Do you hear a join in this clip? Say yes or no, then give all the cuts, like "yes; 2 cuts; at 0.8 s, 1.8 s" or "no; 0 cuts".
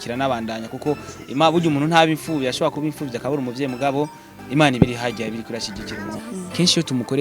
yes; 1 cut; at 6.2 s